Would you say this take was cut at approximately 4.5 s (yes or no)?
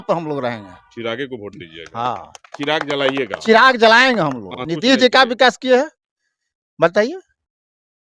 yes